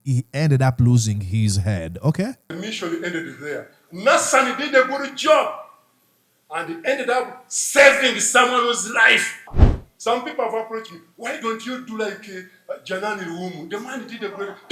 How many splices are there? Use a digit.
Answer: 1